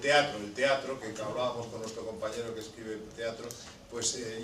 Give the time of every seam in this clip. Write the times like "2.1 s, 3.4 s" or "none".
2.0 s